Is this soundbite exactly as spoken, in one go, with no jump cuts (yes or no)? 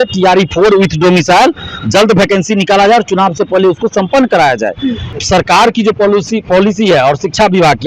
no